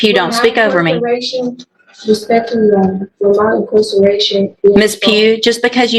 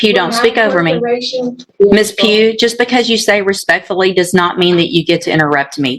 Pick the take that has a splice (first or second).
second